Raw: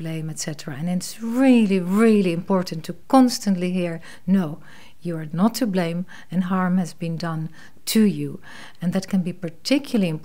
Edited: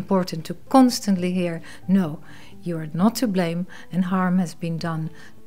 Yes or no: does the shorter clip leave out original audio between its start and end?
no